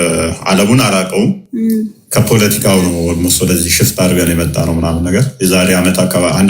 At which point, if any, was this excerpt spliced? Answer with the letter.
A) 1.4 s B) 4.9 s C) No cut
C